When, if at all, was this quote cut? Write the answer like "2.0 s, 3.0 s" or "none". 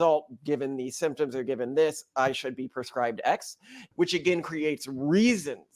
3.8 s